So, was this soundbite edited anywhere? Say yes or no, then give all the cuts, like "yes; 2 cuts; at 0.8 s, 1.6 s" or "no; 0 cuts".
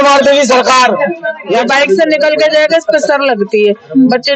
yes; 1 cut; at 1.6 s